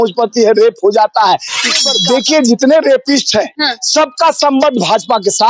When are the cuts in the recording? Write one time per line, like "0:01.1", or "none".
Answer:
0:01.8